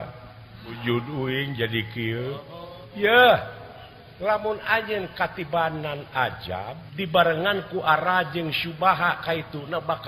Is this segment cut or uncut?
cut